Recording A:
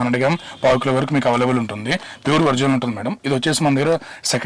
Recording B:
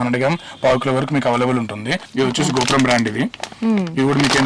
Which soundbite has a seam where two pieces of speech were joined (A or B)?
B